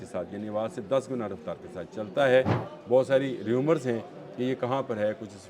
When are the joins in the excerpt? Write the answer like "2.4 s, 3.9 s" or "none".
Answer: 2.7 s

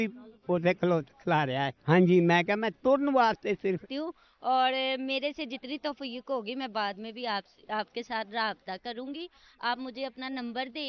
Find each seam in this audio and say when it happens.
3.8 s

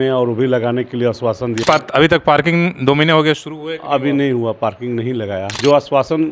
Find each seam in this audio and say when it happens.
1.6 s, 5.5 s

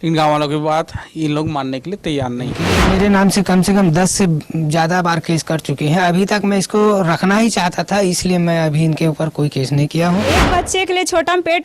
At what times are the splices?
2.7 s, 10.3 s

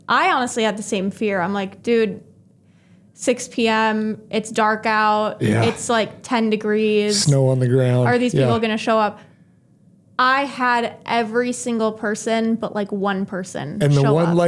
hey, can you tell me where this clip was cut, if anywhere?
none

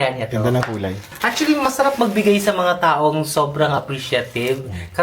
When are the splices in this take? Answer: 1.0 s

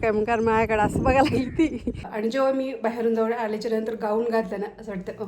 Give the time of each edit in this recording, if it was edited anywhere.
1.9 s

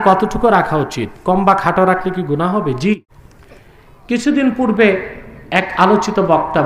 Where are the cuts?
3.0 s

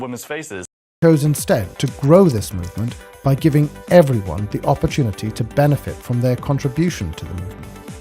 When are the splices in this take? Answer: 1.0 s

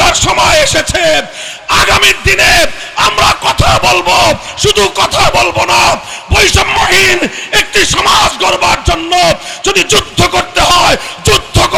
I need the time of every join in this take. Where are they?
none

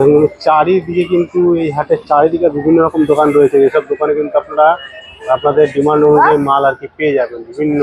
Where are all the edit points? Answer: none

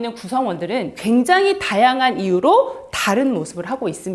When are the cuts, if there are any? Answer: none

